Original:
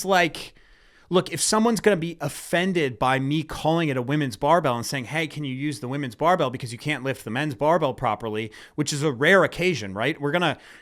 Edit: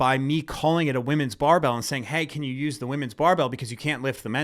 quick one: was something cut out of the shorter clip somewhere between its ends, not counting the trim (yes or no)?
no